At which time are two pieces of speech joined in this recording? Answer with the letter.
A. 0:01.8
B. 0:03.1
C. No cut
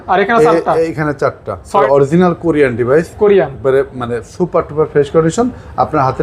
A